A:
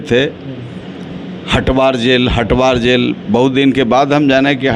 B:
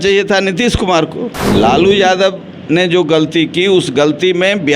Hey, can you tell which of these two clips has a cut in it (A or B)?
B